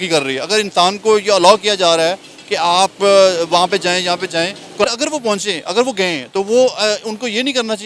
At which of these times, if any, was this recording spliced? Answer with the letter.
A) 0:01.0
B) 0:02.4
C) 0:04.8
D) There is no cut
C